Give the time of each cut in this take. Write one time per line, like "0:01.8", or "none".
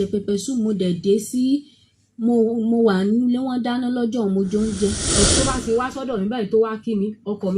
0:05.2